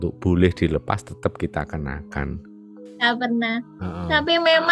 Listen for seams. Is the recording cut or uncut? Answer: cut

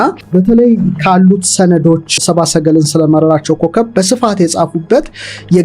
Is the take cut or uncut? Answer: cut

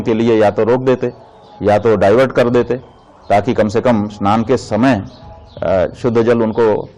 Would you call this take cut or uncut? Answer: uncut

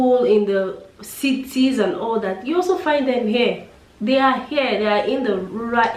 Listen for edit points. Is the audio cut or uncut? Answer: uncut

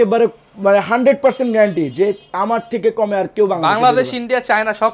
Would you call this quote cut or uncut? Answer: uncut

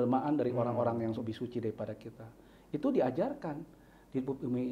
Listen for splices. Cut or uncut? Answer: uncut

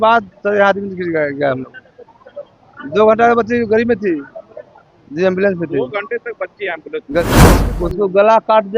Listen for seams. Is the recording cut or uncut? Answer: cut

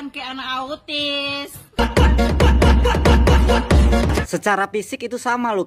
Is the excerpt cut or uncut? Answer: cut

